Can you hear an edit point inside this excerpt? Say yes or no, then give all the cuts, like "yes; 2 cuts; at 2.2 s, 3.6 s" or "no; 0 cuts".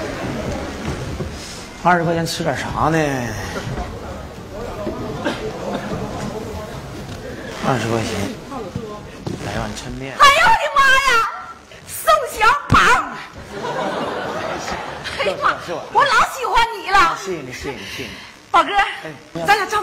no; 0 cuts